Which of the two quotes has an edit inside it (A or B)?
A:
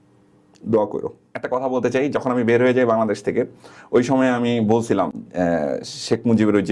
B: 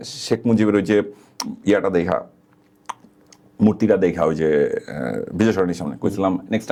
A